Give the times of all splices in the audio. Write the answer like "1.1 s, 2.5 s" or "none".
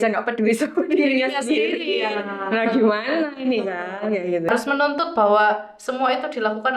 4.5 s